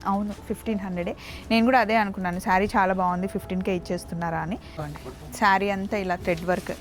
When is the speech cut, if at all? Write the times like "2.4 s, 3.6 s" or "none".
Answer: 4.8 s